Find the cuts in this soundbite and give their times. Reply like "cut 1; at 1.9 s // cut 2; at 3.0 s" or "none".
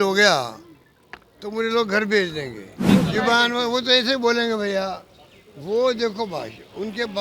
cut 1; at 2.8 s